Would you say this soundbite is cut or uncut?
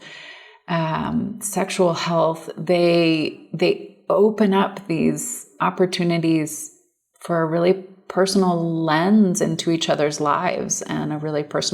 cut